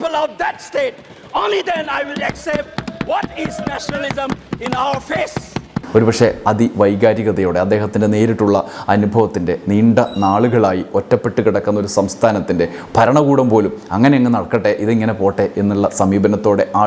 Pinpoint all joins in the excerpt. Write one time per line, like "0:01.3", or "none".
none